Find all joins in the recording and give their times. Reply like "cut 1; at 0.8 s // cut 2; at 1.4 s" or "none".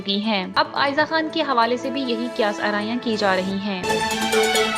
cut 1; at 3.8 s

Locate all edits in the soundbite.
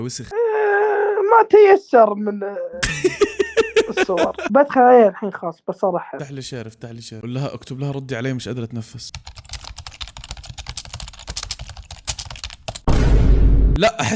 cut 1; at 4.4 s

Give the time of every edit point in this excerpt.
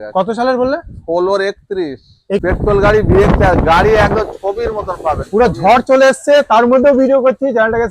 cut 1; at 2.4 s

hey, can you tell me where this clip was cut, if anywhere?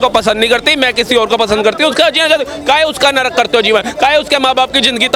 none

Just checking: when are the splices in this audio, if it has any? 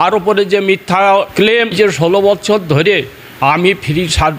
cut 1; at 1.7 s

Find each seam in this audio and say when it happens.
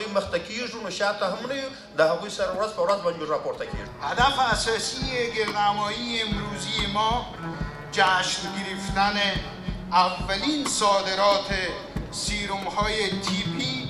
cut 1; at 3.6 s

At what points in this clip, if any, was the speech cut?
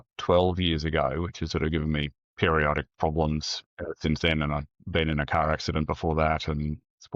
none

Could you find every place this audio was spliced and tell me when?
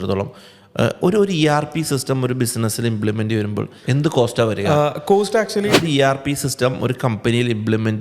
cut 1; at 3.7 s // cut 2; at 5.8 s

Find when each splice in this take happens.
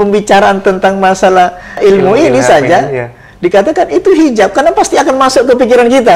cut 1; at 1.8 s

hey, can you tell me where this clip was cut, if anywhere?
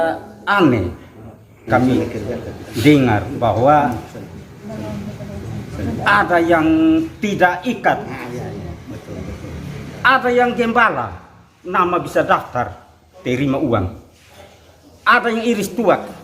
cut 1; at 1.7 s

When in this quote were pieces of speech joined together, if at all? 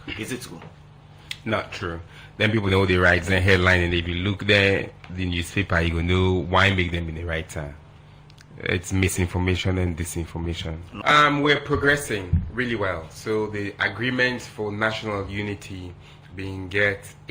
cut 1; at 10.9 s

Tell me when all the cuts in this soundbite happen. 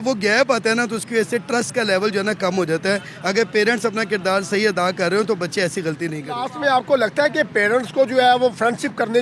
cut 1; at 6.2 s

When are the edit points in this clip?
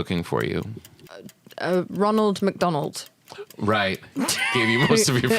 cut 1; at 1.0 s

